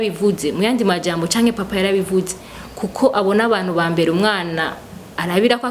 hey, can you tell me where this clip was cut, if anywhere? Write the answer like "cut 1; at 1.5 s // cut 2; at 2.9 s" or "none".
none